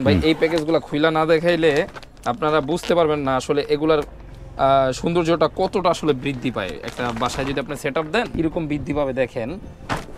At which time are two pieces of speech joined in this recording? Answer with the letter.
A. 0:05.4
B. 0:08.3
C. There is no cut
B